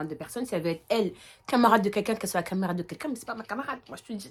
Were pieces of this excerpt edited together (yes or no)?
no